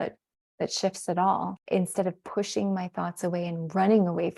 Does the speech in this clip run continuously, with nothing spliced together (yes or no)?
no